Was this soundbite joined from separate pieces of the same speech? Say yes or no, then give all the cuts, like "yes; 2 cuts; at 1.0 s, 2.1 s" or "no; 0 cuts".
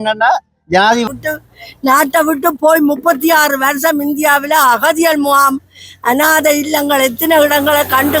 yes; 1 cut; at 1.1 s